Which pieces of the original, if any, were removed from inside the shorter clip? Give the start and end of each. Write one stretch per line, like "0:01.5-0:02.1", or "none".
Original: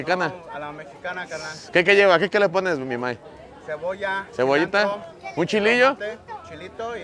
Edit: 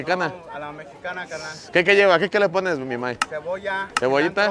0:03.3-0:03.6